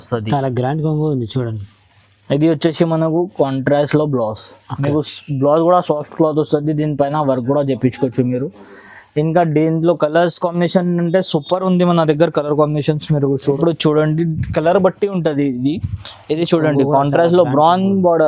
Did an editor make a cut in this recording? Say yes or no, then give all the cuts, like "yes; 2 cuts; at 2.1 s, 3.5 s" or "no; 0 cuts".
yes; 1 cut; at 13.4 s